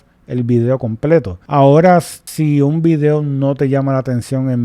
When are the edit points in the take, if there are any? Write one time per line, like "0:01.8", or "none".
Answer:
0:01.4
0:02.2